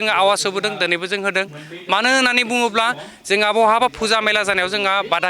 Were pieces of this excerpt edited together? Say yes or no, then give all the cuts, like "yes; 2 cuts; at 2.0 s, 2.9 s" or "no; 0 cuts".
no; 0 cuts